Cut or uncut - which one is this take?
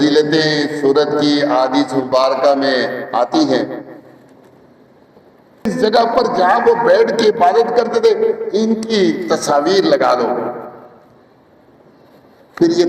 cut